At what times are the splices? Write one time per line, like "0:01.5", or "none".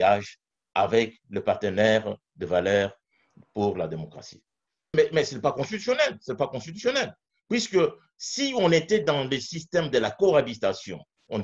0:04.9

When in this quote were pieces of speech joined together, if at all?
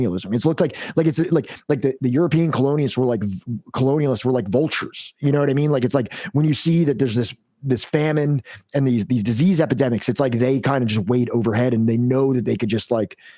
none

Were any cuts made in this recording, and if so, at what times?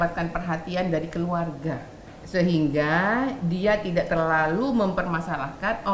none

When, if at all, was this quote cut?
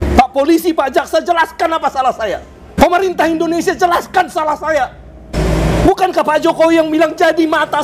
0:02.7
0:05.3

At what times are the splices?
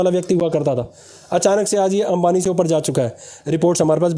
none

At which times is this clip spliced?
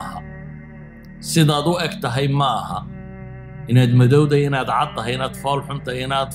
none

